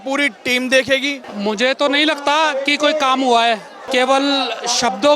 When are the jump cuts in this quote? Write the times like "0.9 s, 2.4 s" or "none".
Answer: 1.2 s, 3.8 s